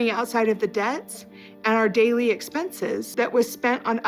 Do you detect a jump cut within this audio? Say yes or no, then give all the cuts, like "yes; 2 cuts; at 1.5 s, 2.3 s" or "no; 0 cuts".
yes; 1 cut; at 3.1 s